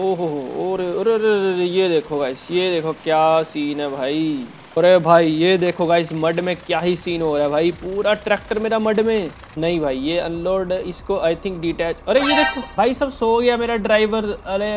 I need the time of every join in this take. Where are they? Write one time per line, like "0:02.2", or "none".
0:04.8
0:09.4
0:12.6